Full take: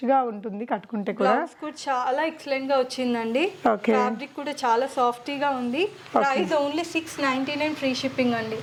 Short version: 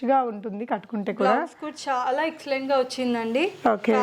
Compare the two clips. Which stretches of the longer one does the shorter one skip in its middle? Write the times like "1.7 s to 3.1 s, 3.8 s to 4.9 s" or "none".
none